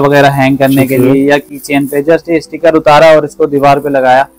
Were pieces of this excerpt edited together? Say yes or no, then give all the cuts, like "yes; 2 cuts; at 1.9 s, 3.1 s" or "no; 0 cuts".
no; 0 cuts